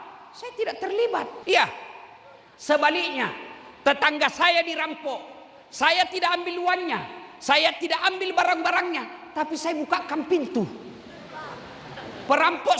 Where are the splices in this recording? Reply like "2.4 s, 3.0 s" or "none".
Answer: 1.4 s